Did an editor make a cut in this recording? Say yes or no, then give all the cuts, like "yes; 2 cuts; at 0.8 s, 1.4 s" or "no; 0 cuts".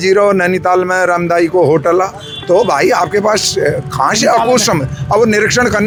no; 0 cuts